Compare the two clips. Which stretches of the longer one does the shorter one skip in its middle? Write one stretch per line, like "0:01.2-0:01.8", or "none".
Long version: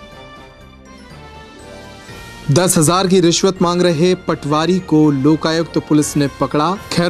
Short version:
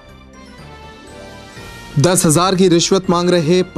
none